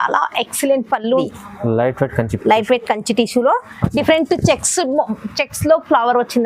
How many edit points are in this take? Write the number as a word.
one